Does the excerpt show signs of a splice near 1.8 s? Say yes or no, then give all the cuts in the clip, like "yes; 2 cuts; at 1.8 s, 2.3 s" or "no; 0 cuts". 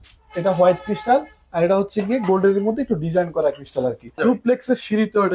no; 1 cut; at 4.2 s